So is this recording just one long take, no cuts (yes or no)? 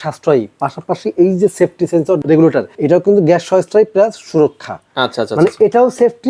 no